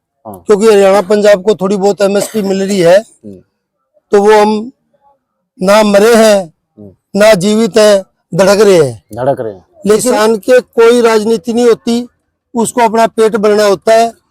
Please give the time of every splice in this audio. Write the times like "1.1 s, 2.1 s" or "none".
10.1 s